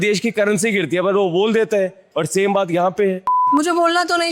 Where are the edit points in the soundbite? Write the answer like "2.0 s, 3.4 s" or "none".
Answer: 3.4 s

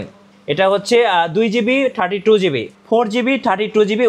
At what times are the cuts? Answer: 2.7 s

